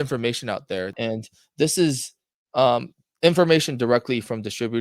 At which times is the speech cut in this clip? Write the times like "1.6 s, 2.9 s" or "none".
0.9 s